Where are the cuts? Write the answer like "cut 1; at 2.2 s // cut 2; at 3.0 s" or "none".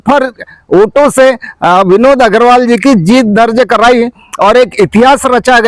none

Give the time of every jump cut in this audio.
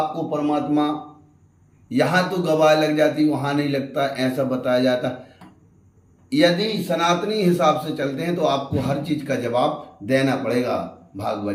none

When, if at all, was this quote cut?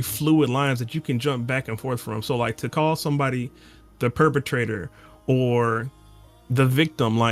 none

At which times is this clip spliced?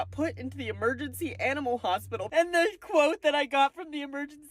cut 1; at 2.3 s

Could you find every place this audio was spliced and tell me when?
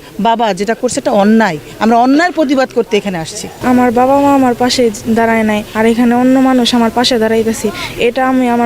cut 1; at 3.5 s

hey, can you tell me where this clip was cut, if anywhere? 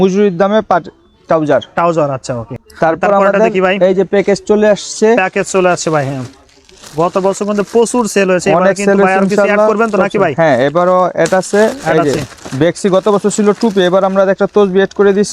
none

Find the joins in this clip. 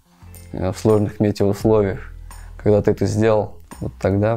none

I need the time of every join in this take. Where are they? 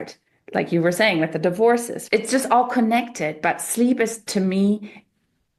cut 1; at 1.9 s

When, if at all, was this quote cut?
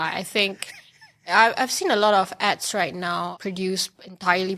cut 1; at 3.3 s

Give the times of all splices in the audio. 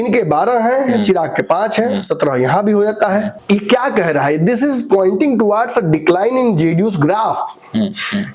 cut 1; at 3.3 s

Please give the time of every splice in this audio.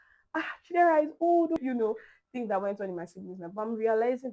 none

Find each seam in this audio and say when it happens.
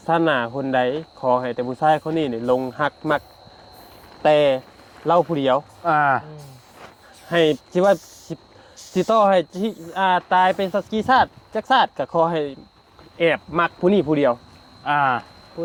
none

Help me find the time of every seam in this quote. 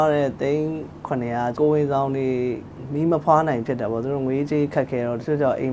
cut 1; at 1.5 s // cut 2; at 2.8 s

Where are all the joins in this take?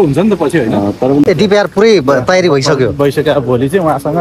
cut 1; at 1.2 s

